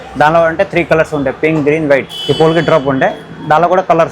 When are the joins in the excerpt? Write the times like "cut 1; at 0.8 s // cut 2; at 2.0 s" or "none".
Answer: cut 1; at 2.1 s